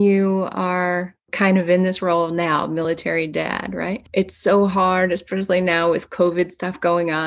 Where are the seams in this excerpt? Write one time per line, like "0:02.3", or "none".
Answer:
0:01.3
0:04.1